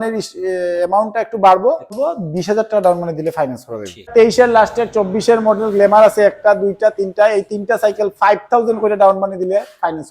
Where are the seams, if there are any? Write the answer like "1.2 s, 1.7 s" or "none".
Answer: 1.9 s, 4.1 s